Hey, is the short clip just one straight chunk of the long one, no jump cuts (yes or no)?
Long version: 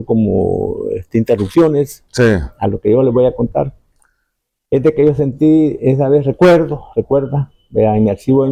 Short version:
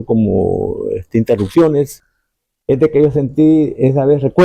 no